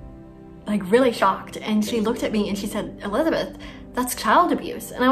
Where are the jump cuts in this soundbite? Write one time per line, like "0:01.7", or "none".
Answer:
none